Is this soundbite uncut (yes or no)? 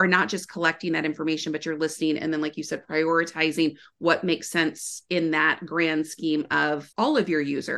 no